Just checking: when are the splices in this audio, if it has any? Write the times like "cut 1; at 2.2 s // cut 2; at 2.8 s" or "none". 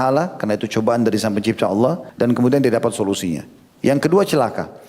cut 1; at 2.1 s